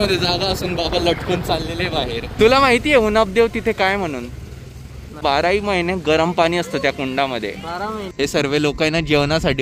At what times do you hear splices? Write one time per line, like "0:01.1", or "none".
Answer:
0:02.4
0:05.2
0:08.1